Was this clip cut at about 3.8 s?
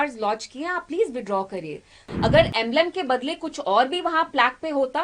no; 1 cut; at 2.0 s

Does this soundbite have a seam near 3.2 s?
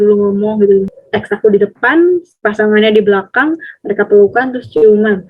no; 1 cut; at 0.9 s

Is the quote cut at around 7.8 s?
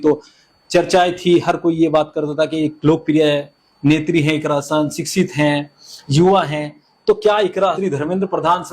yes; 1 cut; at 7.8 s

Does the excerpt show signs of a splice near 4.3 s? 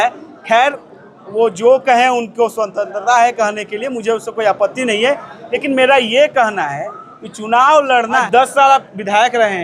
no; 1 cut; at 8.3 s

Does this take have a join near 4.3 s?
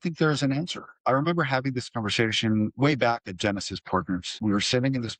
yes; 3 cuts; at 1.0 s, 2.7 s, 4.3 s

